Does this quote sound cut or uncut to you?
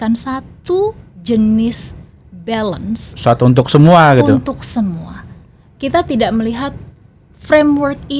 uncut